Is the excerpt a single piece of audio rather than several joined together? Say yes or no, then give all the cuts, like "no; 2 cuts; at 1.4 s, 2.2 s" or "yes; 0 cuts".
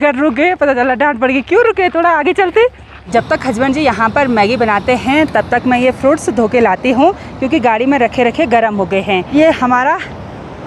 no; 2 cuts; at 2.9 s, 9.3 s